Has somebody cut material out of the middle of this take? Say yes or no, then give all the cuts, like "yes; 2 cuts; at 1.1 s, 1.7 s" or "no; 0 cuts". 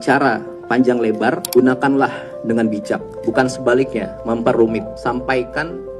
yes; 4 cuts; at 1.4 s, 3.1 s, 4.1 s, 4.9 s